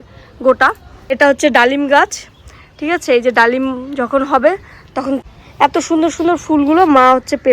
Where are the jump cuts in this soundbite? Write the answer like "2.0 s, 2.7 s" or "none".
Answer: 1.1 s, 5.2 s